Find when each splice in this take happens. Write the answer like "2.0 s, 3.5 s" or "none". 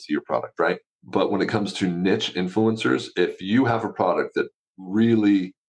0.9 s

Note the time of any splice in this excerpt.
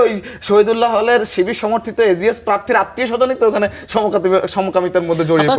none

